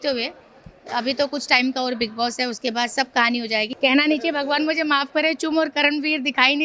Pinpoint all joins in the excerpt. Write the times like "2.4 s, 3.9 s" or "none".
3.7 s